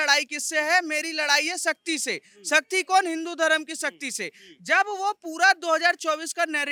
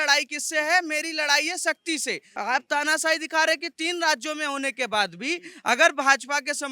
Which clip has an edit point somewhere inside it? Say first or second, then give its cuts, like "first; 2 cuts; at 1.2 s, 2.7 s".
second; 1 cut; at 2.3 s